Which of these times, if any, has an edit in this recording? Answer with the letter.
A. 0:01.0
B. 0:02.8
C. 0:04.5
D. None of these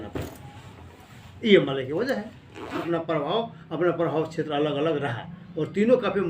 B